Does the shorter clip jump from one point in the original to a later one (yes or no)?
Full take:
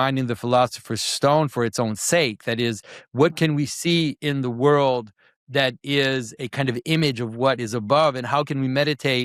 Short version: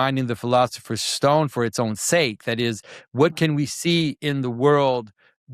no